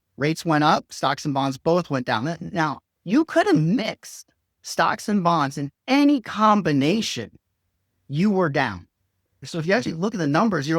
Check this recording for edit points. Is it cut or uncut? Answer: cut